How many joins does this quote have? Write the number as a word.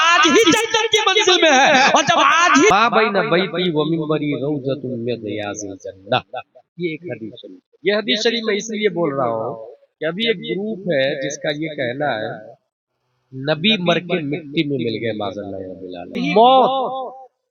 two